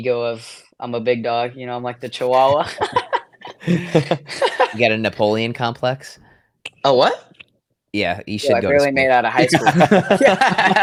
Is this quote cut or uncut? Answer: uncut